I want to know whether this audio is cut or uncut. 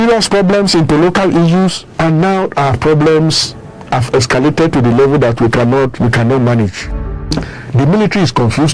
cut